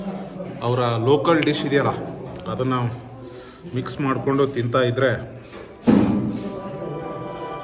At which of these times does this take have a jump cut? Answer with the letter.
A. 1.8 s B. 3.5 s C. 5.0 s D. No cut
D